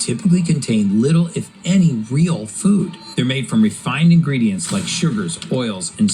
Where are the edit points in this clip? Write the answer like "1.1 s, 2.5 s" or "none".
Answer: 3.0 s